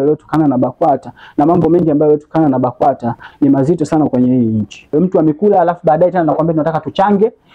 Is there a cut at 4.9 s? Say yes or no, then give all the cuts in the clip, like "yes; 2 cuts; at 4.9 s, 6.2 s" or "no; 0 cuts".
yes; 1 cut; at 4.9 s